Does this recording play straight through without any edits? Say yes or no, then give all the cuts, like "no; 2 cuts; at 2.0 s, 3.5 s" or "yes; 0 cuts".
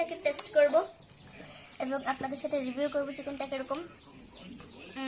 yes; 0 cuts